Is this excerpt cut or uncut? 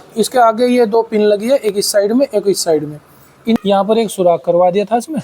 cut